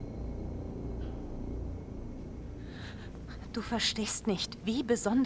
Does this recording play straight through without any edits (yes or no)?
yes